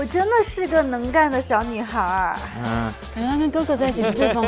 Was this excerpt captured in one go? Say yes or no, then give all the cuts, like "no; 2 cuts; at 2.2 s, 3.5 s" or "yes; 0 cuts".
no; 1 cut; at 3.0 s